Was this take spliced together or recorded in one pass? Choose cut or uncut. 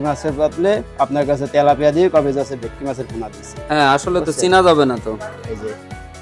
uncut